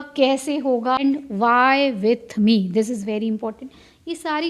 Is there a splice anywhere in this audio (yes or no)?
yes